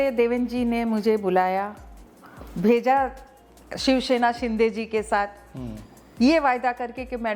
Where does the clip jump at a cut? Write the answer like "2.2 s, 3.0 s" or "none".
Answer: none